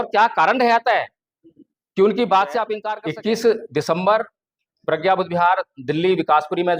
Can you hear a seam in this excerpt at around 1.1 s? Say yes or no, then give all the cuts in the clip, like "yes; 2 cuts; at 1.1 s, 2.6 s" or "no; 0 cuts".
no; 1 cut; at 2.8 s